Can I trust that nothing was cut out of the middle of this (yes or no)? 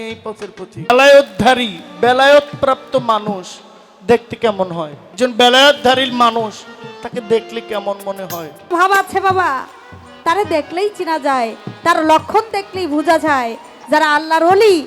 no